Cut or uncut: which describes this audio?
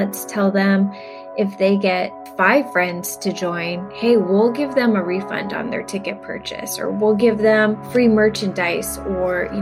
cut